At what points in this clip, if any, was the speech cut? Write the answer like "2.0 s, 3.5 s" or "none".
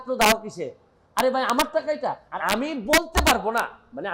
2.3 s